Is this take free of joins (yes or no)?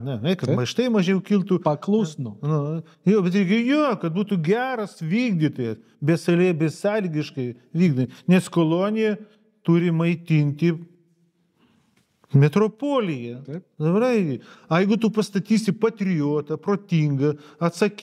yes